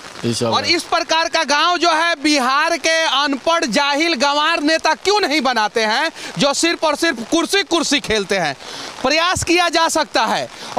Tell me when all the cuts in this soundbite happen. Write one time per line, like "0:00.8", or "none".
none

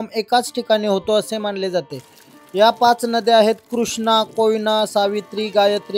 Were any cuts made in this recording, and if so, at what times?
none

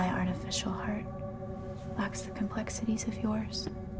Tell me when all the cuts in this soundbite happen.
none

